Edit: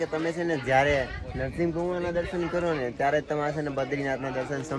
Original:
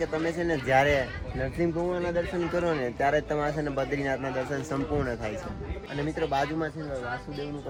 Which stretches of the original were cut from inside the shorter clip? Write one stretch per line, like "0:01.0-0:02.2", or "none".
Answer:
none